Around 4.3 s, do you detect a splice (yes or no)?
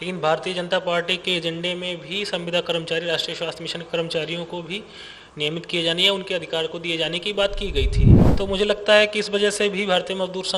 no